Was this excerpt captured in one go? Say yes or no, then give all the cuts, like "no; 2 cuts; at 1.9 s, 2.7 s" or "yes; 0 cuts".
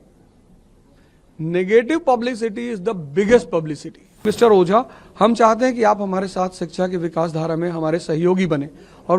no; 1 cut; at 4.2 s